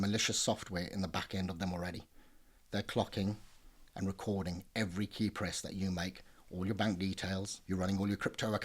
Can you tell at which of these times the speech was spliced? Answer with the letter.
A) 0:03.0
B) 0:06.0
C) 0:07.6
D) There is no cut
C